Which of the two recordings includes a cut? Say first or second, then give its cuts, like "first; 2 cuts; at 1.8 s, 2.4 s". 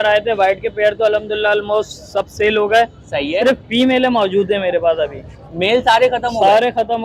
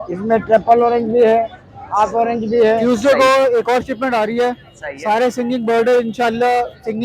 second; 1 cut; at 2.8 s